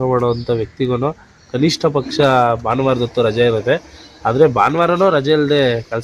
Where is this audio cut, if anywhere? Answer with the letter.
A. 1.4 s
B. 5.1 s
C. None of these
C